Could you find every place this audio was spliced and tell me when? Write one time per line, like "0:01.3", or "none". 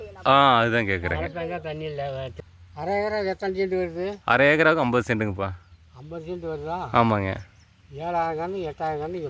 0:02.3